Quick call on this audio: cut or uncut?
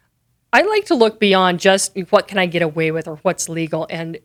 uncut